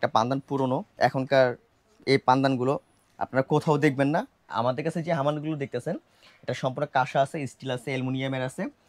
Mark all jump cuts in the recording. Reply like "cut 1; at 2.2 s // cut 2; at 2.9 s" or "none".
cut 1; at 0.9 s // cut 2; at 4.5 s